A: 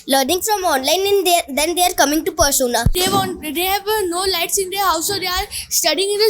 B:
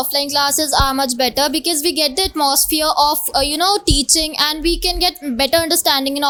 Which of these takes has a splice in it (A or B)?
A